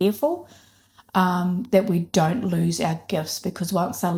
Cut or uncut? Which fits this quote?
uncut